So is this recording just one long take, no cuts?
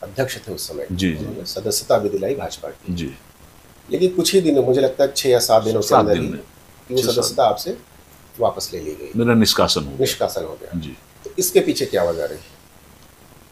yes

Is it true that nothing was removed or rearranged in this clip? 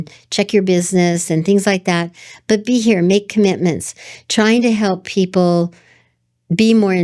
yes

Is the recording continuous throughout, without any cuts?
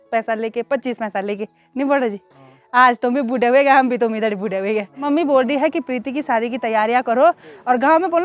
no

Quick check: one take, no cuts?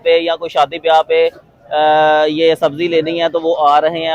yes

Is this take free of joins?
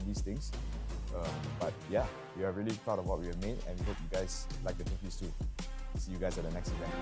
yes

